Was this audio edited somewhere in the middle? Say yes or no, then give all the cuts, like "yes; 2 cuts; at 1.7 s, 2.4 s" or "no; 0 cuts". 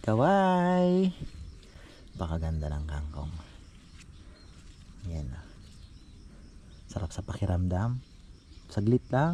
no; 0 cuts